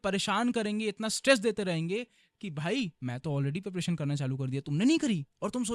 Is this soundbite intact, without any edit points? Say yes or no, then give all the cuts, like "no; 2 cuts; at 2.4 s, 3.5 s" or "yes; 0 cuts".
no; 1 cut; at 3.0 s